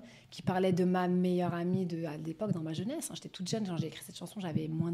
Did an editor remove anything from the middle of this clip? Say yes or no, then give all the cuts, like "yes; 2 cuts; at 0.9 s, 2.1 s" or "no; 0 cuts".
no; 0 cuts